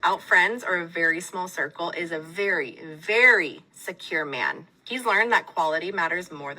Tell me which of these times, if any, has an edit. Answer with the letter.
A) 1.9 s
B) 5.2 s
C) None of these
B